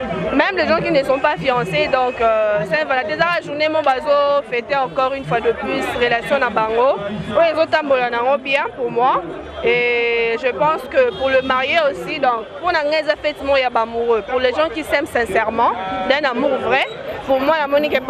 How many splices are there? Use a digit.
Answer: 0